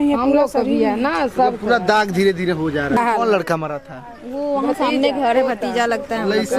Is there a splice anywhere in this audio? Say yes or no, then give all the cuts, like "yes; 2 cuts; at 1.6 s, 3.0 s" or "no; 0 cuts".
yes; 1 cut; at 3.0 s